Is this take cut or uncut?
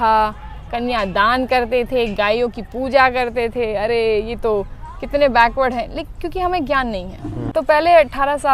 cut